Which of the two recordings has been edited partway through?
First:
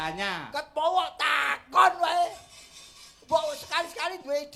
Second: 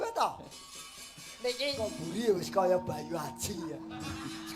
second; 1 cut; at 1.8 s

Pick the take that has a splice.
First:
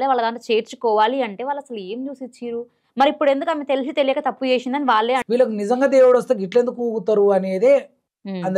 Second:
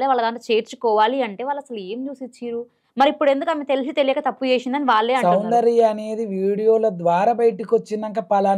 first; 1 cut; at 5.2 s

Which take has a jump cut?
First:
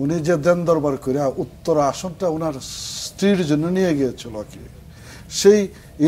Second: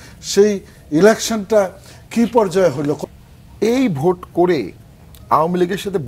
second; 1 cut; at 3.1 s

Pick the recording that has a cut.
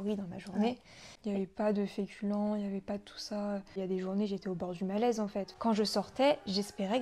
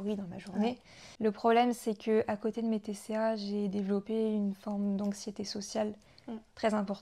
first; 3 cuts; at 1.1 s, 3.7 s, 5.5 s

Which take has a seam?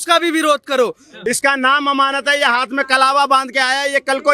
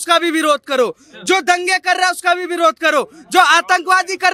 first; 1 cut; at 1.1 s

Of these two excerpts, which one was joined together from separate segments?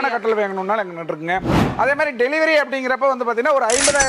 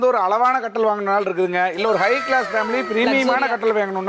first; 1 cut; at 1.6 s

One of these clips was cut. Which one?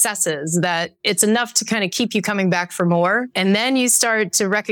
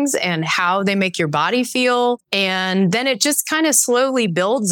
second; 1 cut; at 2.2 s

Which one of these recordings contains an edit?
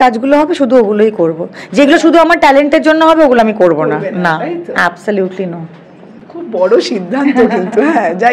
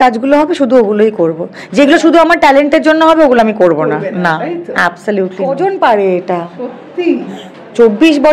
second; 1 cut; at 5.4 s

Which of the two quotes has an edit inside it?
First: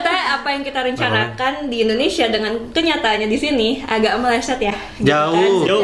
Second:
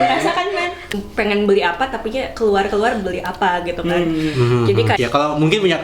second; 2 cuts; at 1.0 s, 5.0 s

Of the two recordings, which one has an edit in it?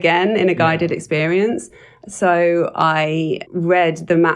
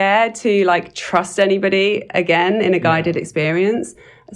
first; 1 cut; at 3.4 s

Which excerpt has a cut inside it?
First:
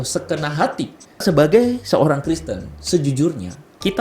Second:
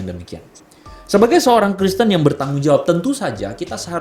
first; 1 cut; at 1.2 s

